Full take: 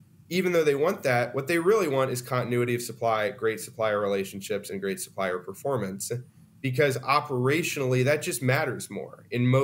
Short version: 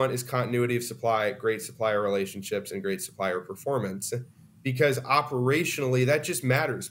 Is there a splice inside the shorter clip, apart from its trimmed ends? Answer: no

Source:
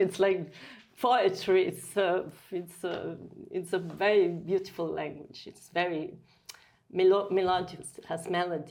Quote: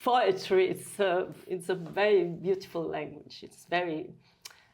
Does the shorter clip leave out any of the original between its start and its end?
yes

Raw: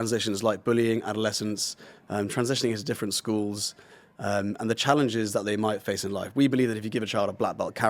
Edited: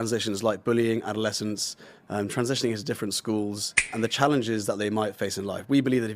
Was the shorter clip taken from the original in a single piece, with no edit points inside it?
no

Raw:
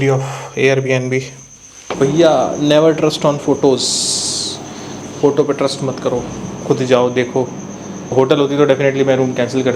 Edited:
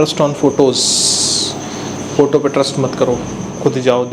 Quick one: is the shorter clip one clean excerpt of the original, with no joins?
yes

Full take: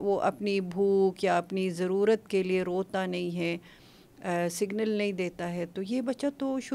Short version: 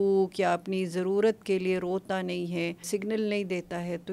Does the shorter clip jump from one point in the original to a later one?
yes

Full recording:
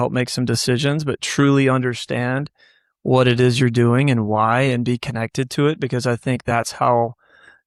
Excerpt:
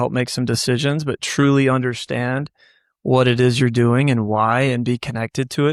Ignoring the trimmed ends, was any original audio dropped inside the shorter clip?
no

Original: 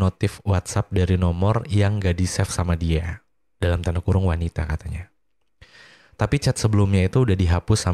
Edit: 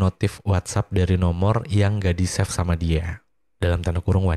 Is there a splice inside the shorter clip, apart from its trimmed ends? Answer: no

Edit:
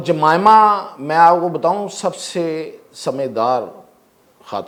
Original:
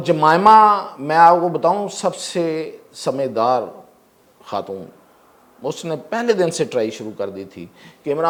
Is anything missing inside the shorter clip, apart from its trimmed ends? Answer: no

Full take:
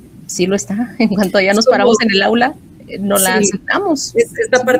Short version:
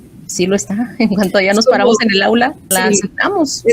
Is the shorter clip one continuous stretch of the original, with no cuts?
no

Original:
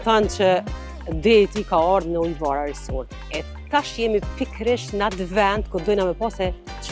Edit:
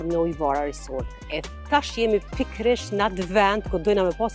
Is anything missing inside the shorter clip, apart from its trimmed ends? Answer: no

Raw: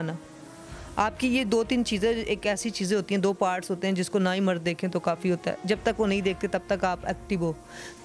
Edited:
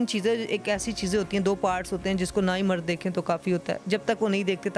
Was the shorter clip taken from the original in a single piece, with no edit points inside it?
yes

